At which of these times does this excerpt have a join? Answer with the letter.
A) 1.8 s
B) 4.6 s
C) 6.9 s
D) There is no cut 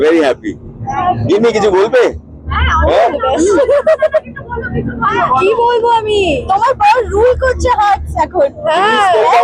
D